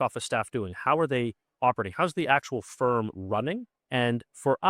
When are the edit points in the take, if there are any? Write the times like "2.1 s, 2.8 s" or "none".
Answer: 3.7 s